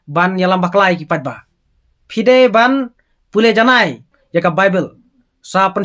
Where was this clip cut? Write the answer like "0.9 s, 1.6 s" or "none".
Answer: 4.1 s